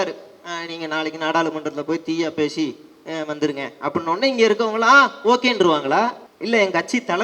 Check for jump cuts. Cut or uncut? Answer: cut